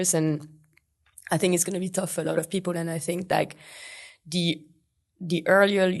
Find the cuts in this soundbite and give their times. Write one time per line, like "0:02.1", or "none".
none